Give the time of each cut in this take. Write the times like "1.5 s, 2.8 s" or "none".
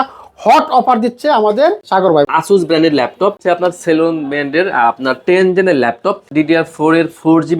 2.1 s, 3.4 s, 6.3 s